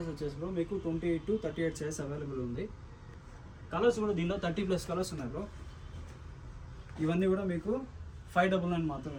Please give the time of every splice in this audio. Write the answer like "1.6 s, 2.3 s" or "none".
none